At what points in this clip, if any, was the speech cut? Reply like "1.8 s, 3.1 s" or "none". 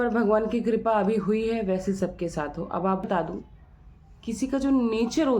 3.0 s